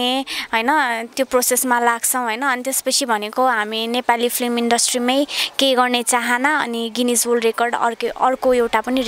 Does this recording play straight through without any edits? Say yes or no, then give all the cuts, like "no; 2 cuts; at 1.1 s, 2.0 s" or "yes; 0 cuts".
yes; 0 cuts